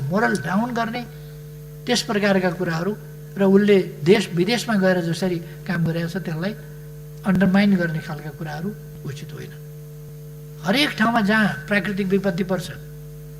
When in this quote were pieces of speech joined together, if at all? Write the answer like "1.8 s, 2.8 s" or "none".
10.1 s